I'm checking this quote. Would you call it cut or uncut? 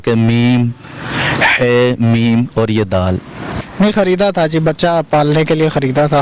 cut